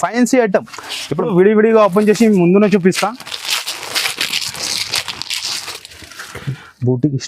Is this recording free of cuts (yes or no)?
no